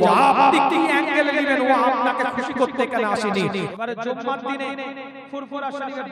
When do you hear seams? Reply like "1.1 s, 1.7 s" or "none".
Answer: 3.7 s